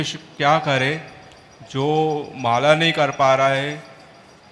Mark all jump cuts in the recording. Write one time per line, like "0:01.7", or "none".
none